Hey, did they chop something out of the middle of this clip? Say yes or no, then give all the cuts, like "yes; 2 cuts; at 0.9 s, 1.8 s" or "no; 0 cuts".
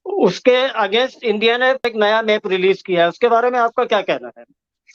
no; 0 cuts